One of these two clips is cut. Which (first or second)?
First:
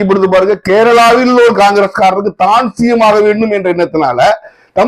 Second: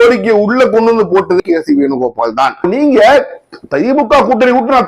second